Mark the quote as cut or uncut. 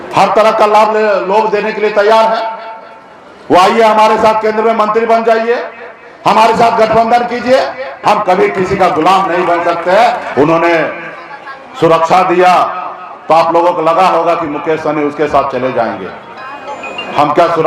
cut